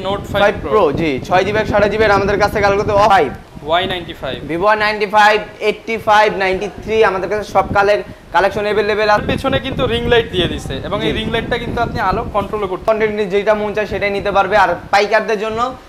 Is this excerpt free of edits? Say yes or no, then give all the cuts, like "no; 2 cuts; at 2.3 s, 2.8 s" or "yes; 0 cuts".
no; 3 cuts; at 3.1 s, 9.2 s, 12.9 s